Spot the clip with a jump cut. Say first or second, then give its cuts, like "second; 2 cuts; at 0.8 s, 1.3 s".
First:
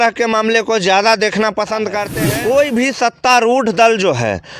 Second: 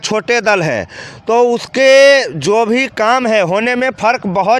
first; 1 cut; at 2.2 s